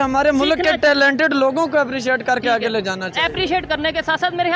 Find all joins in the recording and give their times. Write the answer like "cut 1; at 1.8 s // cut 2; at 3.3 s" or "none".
none